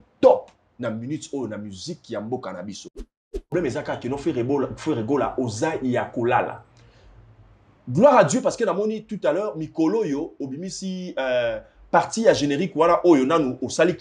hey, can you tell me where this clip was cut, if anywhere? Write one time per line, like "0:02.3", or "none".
0:03.5